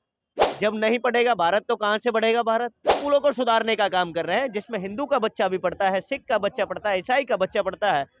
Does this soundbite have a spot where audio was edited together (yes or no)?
yes